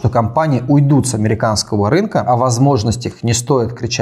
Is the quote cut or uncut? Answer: cut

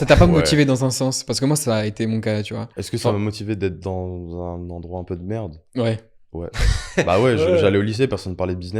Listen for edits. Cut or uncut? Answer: uncut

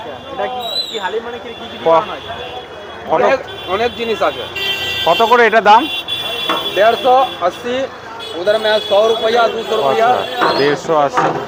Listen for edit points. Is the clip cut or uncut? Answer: uncut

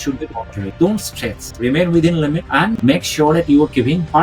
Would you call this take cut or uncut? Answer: uncut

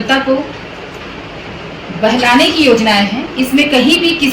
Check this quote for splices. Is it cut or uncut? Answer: uncut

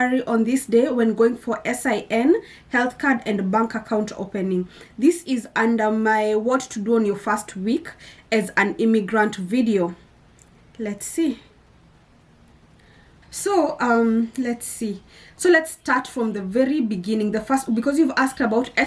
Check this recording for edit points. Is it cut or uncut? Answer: uncut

